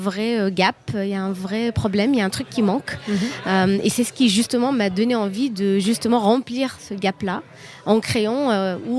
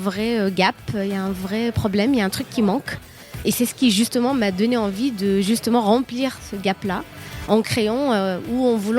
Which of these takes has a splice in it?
second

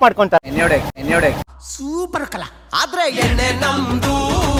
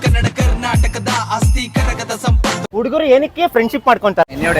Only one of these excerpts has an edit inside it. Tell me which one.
second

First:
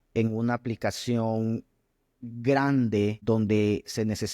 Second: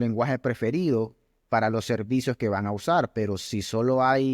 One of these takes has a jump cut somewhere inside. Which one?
first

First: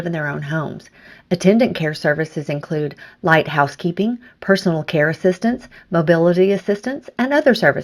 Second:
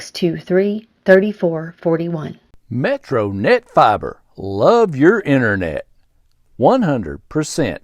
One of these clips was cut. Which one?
second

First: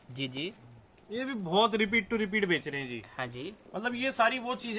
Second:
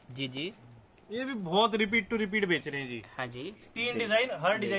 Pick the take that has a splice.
second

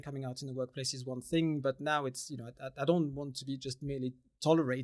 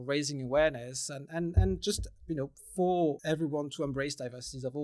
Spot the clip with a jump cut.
second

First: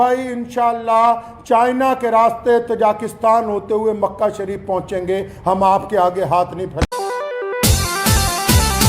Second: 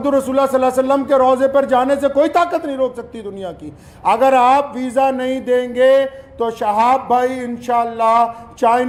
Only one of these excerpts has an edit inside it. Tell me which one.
first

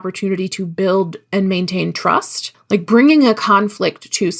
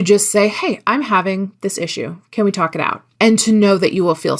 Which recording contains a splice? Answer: second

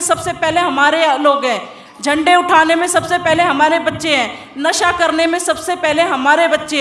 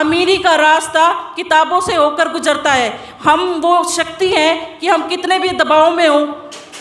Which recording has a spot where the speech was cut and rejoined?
second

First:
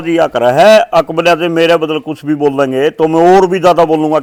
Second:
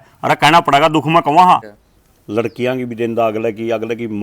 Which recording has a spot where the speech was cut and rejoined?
second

